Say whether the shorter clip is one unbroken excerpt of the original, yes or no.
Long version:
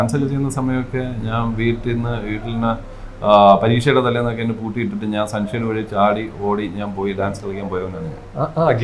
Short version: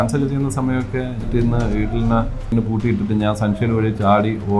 no